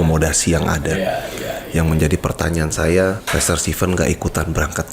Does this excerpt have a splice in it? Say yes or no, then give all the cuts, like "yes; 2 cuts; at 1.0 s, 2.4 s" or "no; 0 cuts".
yes; 1 cut; at 3.2 s